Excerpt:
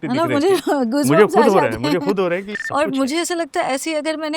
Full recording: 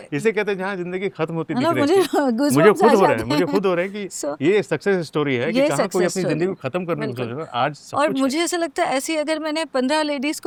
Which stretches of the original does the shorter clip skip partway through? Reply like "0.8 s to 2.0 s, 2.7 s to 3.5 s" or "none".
4.1 s to 7.8 s